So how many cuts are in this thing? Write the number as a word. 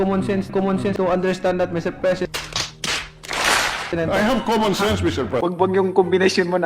two